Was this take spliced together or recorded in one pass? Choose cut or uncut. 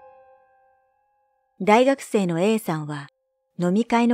uncut